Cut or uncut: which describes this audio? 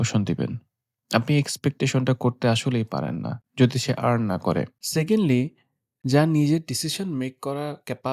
uncut